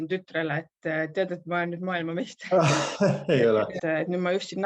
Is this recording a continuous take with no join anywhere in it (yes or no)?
no